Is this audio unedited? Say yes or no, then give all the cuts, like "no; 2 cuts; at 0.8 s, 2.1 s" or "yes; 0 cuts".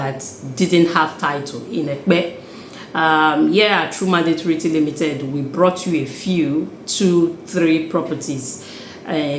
yes; 0 cuts